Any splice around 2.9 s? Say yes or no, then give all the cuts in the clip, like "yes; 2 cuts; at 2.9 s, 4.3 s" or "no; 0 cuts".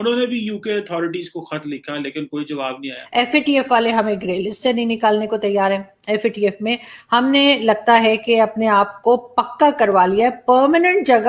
yes; 1 cut; at 2.9 s